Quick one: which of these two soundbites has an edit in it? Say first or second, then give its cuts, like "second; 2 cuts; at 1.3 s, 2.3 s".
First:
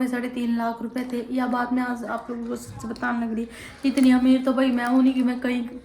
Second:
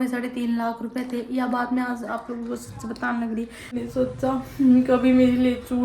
second; 1 cut; at 3.8 s